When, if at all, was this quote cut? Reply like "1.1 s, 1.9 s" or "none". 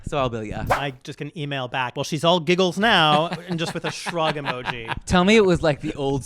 0.8 s, 1.9 s, 4.9 s